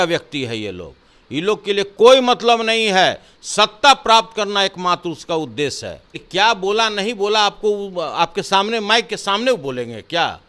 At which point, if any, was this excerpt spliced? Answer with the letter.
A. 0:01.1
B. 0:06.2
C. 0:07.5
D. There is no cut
B